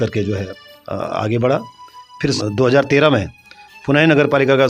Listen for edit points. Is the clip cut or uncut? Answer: uncut